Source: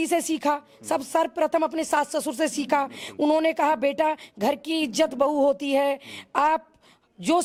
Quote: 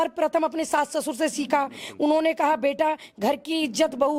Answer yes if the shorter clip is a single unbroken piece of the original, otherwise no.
yes